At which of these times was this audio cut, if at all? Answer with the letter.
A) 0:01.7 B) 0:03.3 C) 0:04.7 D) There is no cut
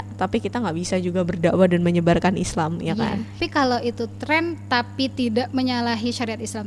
B